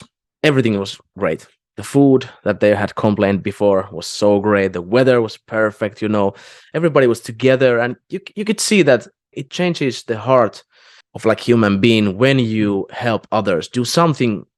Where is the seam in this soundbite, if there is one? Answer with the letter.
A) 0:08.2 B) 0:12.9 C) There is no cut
C